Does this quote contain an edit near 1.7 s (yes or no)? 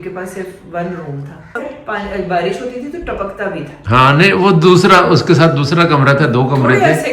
yes